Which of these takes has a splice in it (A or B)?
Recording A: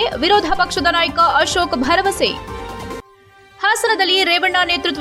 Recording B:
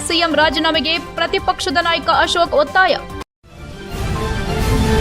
B